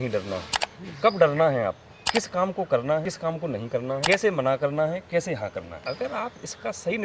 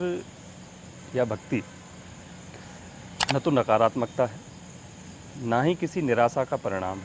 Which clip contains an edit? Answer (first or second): first